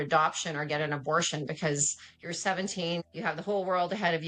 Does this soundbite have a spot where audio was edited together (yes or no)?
yes